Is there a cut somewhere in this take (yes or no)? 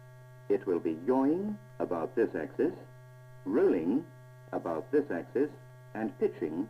no